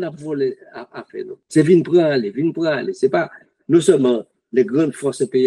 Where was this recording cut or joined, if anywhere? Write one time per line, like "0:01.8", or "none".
0:01.4